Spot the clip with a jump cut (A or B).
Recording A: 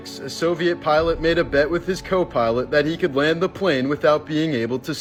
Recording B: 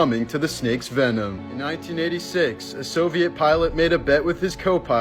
B